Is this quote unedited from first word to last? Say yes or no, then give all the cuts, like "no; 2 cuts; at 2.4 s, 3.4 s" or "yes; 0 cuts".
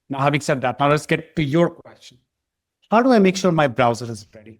yes; 0 cuts